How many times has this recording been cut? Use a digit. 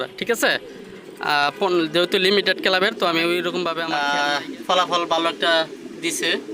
1